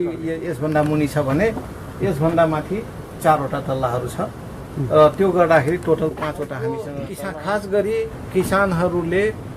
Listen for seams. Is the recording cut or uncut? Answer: cut